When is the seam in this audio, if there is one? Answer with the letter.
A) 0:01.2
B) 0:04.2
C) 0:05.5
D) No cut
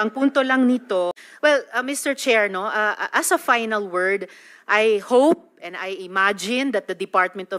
A